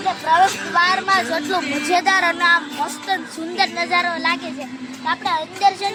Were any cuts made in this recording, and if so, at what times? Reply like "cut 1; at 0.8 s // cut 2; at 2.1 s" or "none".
none